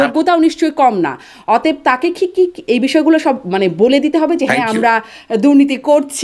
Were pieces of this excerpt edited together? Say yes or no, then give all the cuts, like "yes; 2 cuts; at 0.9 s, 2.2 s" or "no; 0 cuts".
no; 0 cuts